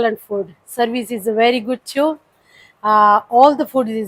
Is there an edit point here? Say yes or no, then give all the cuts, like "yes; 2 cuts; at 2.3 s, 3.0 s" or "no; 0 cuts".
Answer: no; 0 cuts